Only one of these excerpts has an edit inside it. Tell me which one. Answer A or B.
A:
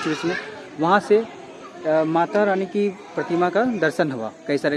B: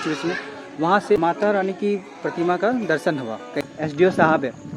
B